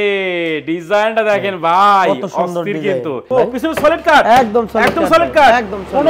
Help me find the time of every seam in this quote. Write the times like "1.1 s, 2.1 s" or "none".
3.2 s